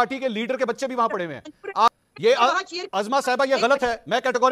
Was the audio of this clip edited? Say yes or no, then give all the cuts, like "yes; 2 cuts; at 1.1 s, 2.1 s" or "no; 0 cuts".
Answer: yes; 1 cut; at 2.0 s